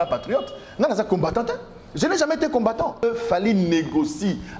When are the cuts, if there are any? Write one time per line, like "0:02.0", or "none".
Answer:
0:03.0